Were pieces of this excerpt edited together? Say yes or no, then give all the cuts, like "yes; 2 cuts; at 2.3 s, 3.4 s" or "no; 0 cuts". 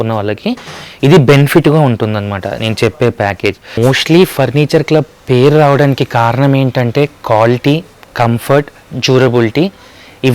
yes; 1 cut; at 3.8 s